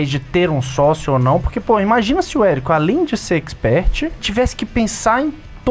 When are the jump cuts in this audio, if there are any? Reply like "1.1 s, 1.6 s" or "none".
4.2 s